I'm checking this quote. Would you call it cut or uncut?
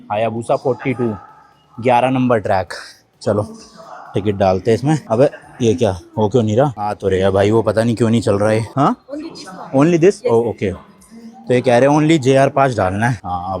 uncut